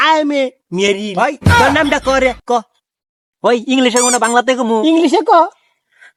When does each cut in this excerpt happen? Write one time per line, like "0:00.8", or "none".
none